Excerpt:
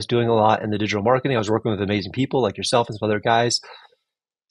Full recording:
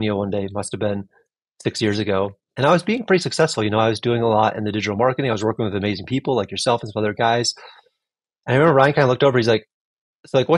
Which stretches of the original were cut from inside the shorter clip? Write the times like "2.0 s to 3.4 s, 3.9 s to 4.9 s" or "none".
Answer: none

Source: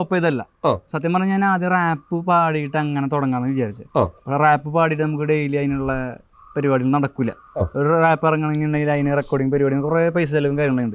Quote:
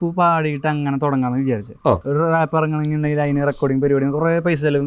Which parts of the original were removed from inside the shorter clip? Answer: 4.1 s to 7.7 s

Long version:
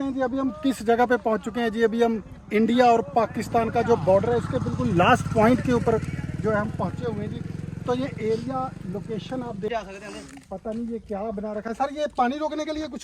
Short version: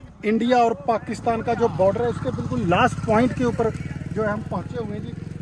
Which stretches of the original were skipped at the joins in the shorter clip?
none

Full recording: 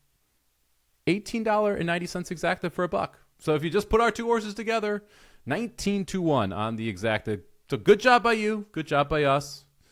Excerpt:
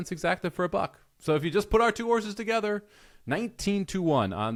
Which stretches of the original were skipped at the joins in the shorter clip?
none

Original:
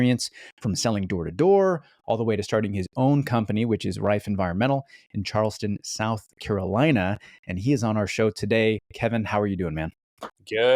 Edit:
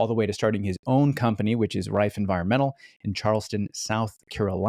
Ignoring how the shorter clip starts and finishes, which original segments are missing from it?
none

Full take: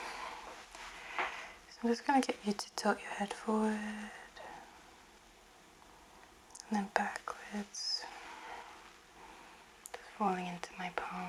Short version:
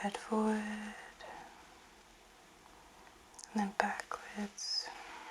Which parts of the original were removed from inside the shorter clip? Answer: none

